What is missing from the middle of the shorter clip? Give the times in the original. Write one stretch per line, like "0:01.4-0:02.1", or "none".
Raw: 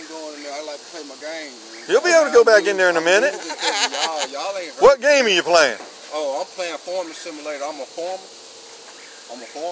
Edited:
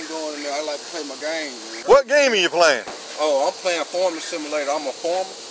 0:01.8-0:04.7

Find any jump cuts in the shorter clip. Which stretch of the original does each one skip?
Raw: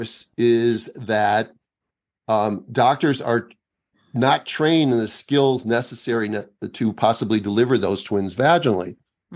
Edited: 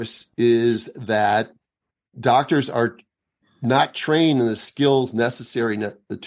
0:02.1-0:02.6

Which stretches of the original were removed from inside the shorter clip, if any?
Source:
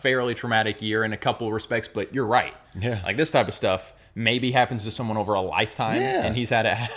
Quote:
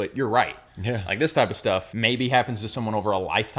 0:03.9-0:04.1

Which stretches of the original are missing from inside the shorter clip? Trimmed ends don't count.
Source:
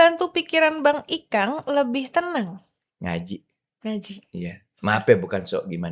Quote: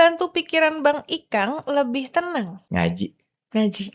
0:02.6-0:02.9

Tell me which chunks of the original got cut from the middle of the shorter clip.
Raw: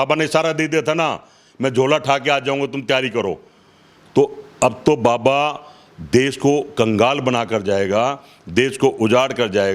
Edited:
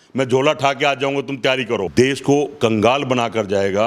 0:03.3-0:06.0

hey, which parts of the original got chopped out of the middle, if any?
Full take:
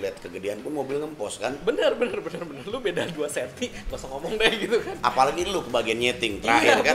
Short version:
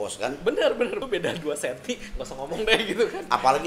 0:02.3-0:02.8

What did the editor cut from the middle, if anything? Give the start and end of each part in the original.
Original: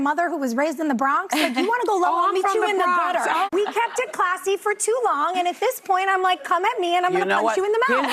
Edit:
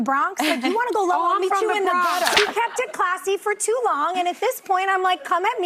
0:03.3-0:03.6

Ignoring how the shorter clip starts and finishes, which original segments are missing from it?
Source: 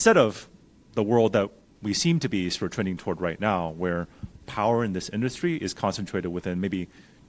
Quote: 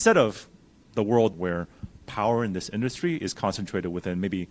0:01.3-0:03.7

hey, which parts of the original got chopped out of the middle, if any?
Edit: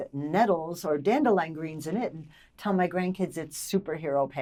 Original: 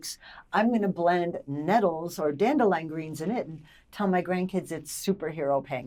none

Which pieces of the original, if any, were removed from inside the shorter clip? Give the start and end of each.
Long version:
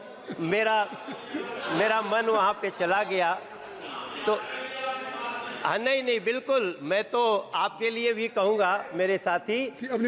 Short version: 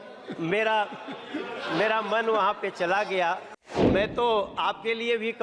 0:03.8-0:06.8

